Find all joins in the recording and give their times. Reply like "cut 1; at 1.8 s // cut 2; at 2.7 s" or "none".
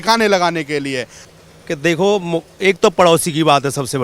cut 1; at 1.2 s